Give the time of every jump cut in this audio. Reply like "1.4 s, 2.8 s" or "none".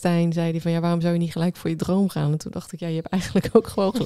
none